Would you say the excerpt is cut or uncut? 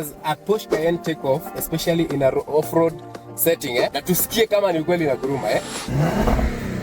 cut